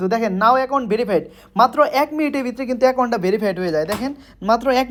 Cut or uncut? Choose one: uncut